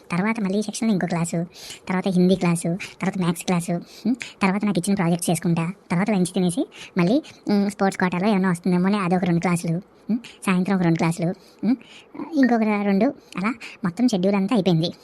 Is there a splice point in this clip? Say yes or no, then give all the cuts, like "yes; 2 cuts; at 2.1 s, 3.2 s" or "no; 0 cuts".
no; 0 cuts